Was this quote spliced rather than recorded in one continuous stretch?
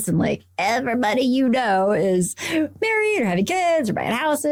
no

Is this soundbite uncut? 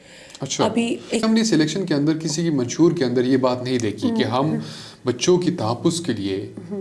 no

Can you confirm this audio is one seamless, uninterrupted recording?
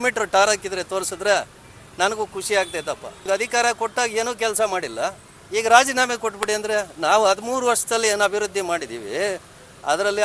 no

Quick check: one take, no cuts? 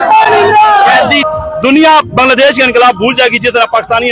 no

